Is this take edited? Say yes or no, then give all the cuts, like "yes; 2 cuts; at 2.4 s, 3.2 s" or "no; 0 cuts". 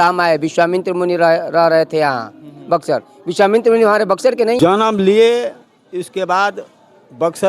yes; 1 cut; at 4.6 s